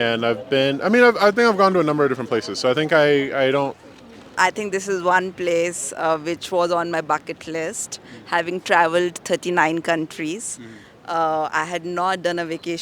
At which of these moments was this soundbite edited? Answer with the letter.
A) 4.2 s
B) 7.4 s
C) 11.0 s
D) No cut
A